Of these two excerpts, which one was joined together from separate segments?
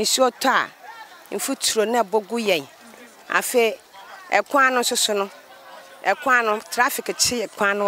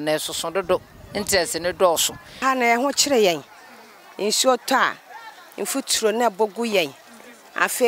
second; 1 cut; at 2.4 s

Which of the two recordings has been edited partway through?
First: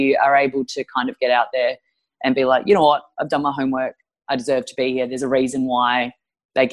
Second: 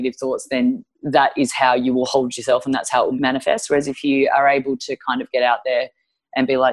second; 1 cut; at 3.1 s

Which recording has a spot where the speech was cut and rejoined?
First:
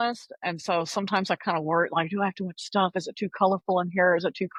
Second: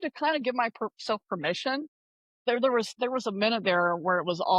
second; 1 cut; at 2.4 s

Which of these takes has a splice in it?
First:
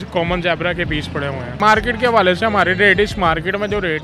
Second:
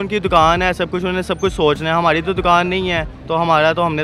first; 1 cut; at 1.6 s

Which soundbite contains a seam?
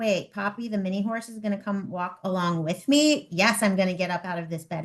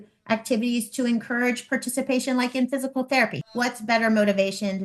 second; 1 cut; at 3.4 s

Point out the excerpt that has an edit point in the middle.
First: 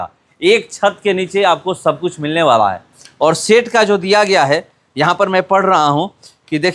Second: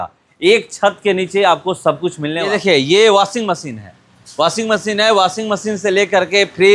second; 1 cut; at 2.4 s

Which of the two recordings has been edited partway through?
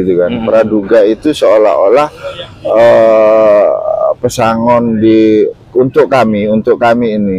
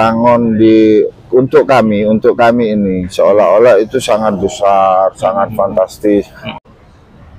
second; 1 cut; at 6.4 s

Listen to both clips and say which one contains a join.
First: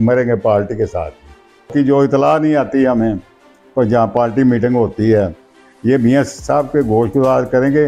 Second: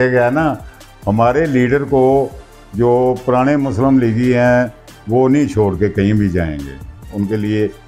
first; 1 cut; at 1.5 s

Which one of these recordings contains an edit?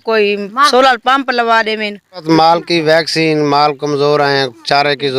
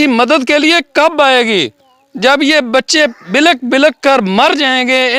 first; 1 cut; at 2.2 s

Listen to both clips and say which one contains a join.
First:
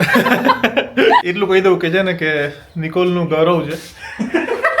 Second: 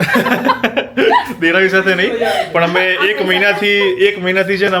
first; 1 cut; at 1.3 s

